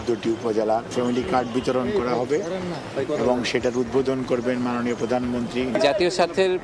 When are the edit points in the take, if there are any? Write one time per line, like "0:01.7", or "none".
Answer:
0:00.9
0:05.8